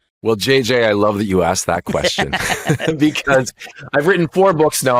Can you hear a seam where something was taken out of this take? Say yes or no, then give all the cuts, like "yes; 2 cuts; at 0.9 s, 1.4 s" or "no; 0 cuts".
no; 0 cuts